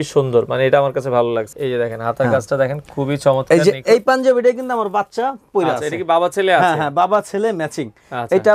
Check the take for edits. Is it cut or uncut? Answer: cut